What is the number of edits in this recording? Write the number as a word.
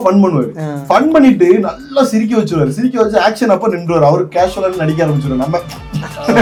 zero